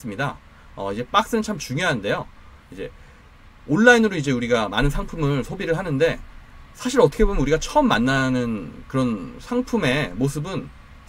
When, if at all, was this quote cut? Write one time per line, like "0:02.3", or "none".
none